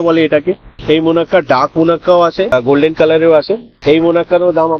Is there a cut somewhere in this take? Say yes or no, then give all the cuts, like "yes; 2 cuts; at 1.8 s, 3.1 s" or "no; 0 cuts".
yes; 1 cut; at 2.5 s